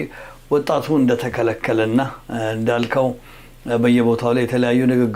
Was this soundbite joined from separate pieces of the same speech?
no; 0 cuts

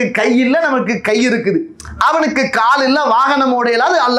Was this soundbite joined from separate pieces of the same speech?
no; 0 cuts

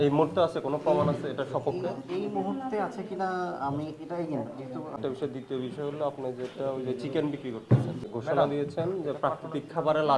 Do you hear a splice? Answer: yes; 2 cuts; at 5.0 s, 8.0 s

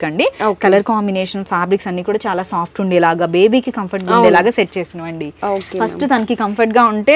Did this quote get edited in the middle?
no; 0 cuts

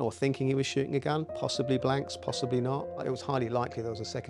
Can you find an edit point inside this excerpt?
yes; 1 cut; at 3.0 s

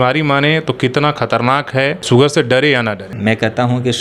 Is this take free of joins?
no; 2 cuts; at 2.0 s, 3.1 s

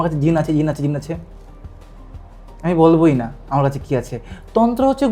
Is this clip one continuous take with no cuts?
yes; 0 cuts

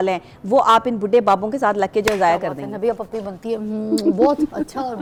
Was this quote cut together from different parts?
no; 0 cuts

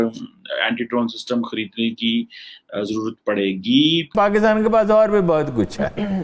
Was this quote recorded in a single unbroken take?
no; 1 cut; at 4.1 s

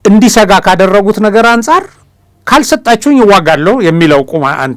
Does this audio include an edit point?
no; 0 cuts

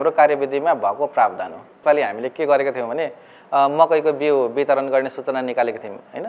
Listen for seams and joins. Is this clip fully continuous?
no; 1 cut; at 1.8 s

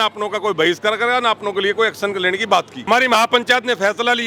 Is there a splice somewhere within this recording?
yes; 1 cut; at 2.9 s

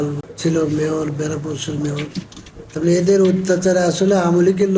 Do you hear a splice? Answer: no; 0 cuts

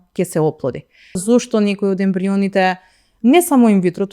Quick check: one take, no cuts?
no; 1 cut; at 1.2 s

